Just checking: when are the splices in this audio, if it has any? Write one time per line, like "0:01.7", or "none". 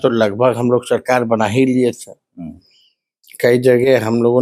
none